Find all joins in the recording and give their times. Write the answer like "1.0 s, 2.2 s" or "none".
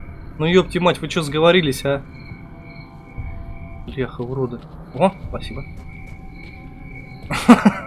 3.9 s